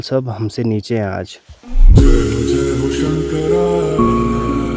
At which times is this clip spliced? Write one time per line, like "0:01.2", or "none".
none